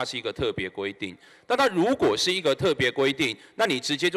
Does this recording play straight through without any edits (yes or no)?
yes